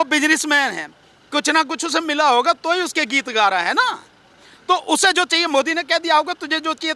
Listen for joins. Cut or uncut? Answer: uncut